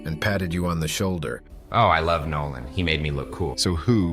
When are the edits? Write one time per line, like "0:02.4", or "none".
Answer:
0:01.3